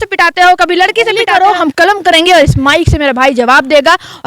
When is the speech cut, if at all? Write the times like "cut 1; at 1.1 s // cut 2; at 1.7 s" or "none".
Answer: cut 1; at 1.2 s